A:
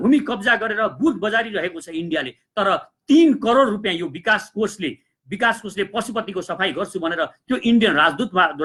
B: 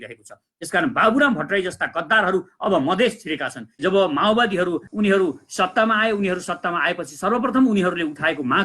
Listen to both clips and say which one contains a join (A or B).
B